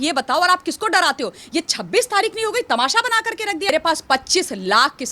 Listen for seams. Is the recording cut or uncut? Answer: cut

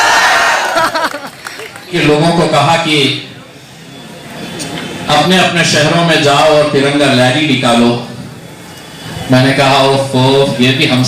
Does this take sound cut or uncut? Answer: cut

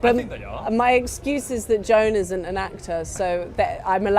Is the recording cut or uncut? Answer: uncut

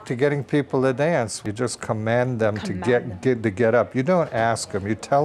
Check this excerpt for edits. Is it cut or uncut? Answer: cut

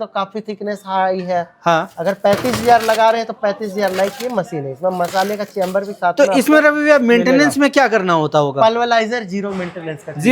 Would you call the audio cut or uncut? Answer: uncut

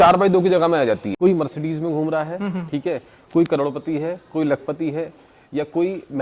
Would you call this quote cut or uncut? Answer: cut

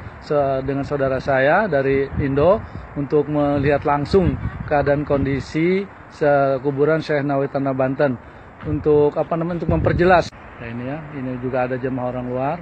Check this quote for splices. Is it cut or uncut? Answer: cut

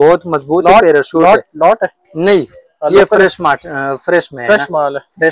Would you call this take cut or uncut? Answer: uncut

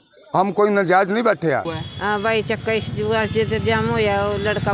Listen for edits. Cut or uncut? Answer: cut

